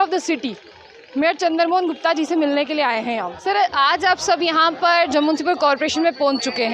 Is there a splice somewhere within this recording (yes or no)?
no